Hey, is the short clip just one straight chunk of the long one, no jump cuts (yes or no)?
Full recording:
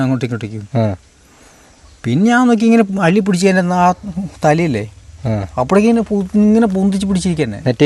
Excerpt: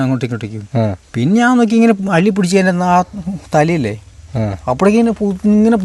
no